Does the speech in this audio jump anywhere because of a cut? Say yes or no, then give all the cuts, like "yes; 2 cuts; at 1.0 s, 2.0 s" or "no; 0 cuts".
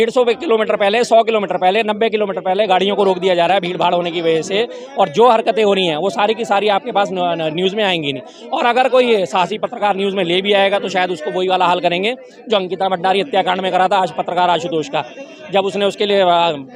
no; 0 cuts